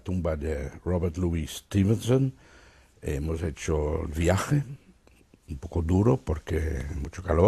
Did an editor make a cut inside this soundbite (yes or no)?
yes